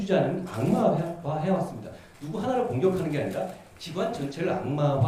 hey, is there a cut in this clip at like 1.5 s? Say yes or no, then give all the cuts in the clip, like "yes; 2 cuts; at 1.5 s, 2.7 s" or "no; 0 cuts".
no; 0 cuts